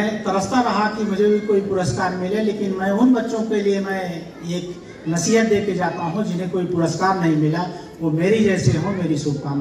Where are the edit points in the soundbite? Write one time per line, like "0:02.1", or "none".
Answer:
none